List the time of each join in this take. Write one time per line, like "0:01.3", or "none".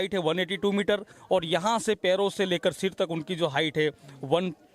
none